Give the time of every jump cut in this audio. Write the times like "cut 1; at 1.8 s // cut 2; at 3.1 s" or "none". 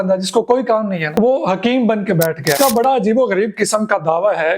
cut 1; at 1.0 s // cut 2; at 2.6 s